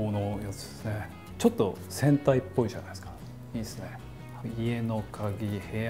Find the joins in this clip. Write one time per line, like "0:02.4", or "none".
0:01.2
0:04.3